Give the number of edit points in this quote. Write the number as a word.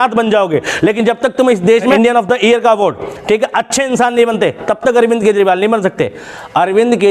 one